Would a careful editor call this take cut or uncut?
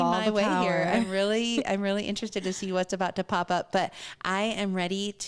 uncut